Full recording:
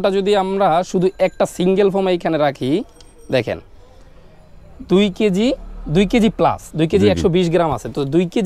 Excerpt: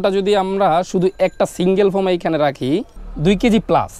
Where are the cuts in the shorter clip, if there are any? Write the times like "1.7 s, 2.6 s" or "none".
3.0 s